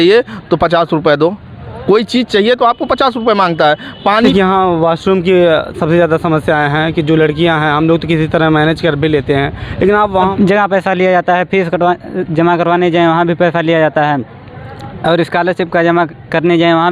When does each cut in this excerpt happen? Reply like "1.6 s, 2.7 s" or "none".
4.3 s, 10.3 s

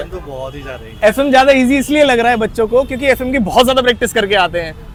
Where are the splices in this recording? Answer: none

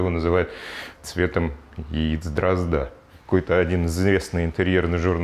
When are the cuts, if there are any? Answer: 1.0 s, 3.1 s

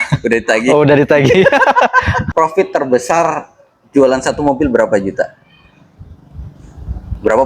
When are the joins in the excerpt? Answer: 2.2 s

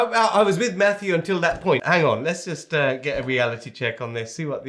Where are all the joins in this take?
1.8 s

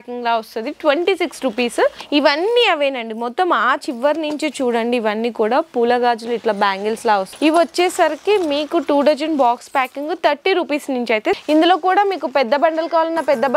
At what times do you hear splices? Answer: 2.0 s, 7.4 s, 11.4 s

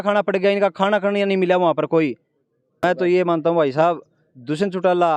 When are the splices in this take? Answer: 2.8 s

